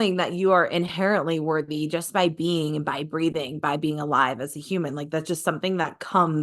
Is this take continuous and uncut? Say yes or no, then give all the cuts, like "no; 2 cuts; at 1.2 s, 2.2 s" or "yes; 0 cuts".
yes; 0 cuts